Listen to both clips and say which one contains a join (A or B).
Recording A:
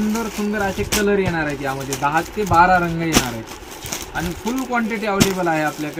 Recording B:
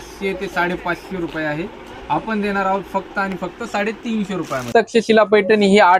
B